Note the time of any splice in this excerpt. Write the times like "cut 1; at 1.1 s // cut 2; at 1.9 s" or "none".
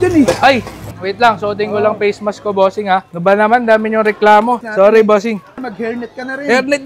cut 1; at 4.7 s // cut 2; at 5.5 s